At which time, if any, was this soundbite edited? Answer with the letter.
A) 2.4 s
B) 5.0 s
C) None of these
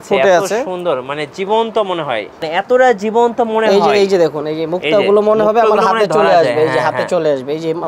A